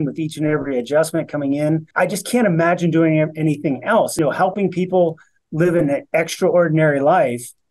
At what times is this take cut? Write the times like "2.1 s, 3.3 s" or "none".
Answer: 1.9 s, 4.2 s